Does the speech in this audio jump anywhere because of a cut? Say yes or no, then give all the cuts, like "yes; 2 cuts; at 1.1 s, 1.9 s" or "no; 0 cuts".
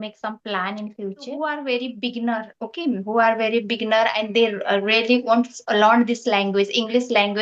yes; 1 cut; at 1.4 s